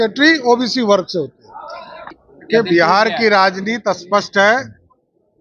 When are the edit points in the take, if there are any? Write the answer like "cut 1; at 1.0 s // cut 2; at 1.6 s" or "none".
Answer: cut 1; at 1.9 s